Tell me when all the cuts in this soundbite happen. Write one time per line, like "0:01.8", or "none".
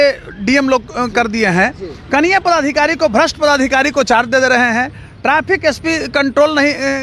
none